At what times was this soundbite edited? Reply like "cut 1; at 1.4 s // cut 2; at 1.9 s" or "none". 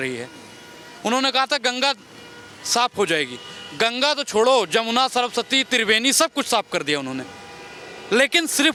none